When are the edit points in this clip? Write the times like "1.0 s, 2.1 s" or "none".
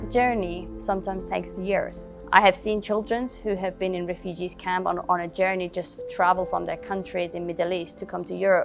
2.0 s